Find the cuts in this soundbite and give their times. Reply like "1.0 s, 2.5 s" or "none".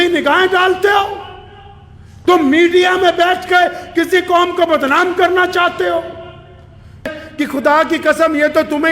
7.2 s